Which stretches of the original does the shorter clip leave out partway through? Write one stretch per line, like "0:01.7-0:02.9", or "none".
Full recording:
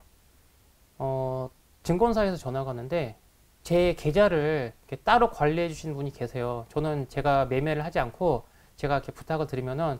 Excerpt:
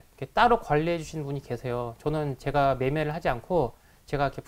none